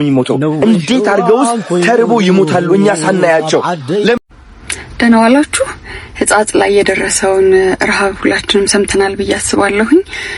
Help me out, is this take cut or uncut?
cut